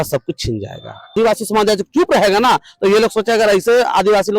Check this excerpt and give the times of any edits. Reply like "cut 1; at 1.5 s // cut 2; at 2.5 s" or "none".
cut 1; at 1.1 s